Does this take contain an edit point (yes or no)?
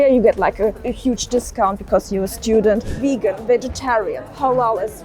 yes